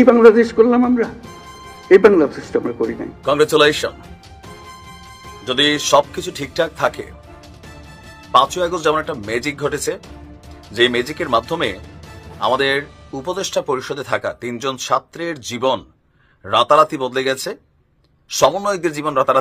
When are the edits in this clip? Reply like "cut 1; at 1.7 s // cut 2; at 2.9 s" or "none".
cut 1; at 3.1 s